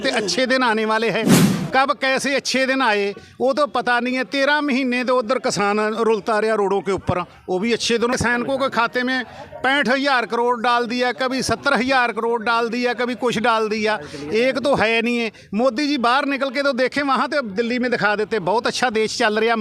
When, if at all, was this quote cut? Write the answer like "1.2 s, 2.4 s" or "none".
8.1 s